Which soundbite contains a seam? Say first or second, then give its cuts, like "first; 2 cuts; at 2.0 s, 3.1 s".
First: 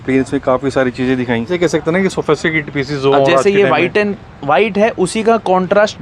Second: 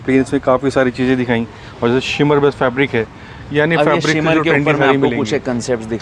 first; 1 cut; at 1.5 s